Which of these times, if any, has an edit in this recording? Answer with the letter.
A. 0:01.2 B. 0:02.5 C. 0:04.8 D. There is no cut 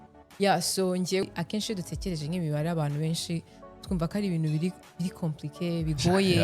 A